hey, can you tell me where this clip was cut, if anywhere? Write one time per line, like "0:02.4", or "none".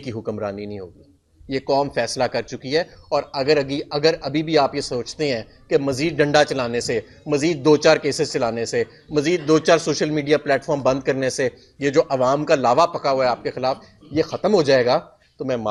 none